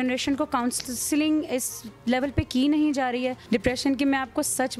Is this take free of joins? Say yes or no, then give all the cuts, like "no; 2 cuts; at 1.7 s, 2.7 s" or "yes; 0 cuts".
no; 1 cut; at 3.4 s